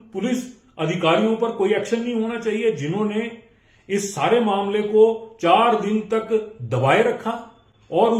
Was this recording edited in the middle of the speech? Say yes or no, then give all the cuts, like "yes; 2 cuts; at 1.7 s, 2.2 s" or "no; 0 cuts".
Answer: no; 0 cuts